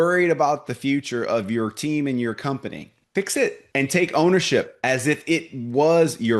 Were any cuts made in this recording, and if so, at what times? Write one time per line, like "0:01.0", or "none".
0:02.9
0:03.6